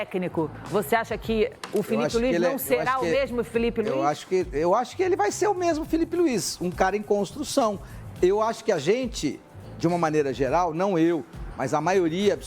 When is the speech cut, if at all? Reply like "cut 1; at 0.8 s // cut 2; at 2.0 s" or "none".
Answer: cut 1; at 2.6 s